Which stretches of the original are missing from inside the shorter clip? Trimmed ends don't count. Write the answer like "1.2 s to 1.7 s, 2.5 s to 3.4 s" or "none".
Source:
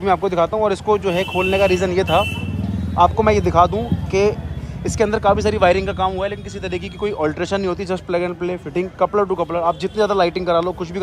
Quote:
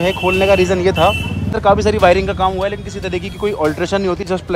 2.7 s to 5.1 s